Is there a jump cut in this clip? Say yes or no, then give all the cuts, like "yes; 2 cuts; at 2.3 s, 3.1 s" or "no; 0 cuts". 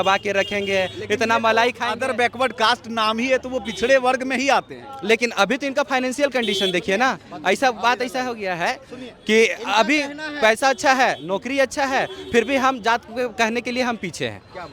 no; 0 cuts